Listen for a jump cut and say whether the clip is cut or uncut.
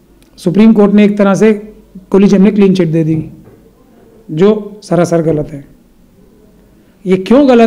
uncut